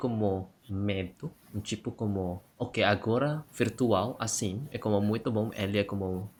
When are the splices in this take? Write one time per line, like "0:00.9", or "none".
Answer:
none